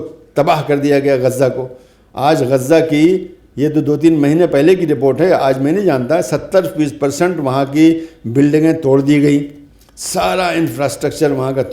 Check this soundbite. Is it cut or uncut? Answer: uncut